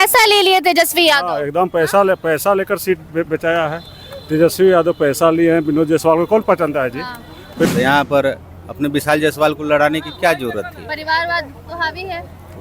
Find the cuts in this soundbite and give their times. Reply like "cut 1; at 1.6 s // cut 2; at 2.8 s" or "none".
cut 1; at 7.7 s